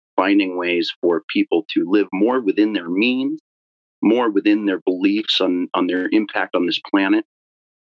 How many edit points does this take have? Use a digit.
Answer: 0